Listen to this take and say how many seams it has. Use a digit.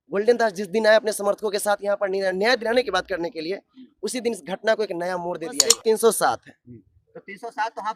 1